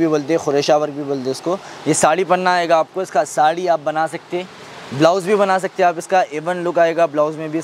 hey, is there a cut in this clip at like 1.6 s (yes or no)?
no